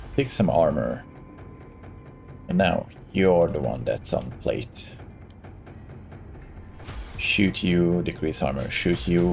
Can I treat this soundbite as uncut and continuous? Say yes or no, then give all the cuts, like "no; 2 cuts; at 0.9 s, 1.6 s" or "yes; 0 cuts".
yes; 0 cuts